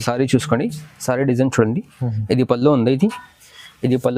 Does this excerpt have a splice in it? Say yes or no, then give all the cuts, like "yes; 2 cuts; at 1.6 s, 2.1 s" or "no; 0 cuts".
no; 0 cuts